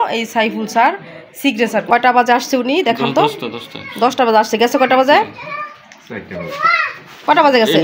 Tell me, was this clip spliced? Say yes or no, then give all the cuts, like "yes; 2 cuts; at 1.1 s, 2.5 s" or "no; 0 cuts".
yes; 1 cut; at 1.9 s